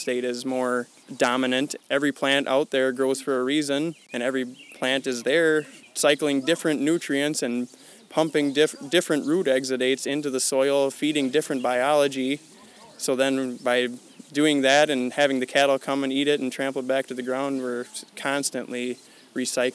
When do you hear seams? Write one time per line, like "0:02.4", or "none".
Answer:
0:01.3
0:04.0
0:05.8